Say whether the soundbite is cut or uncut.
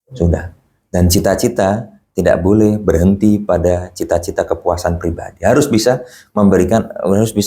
uncut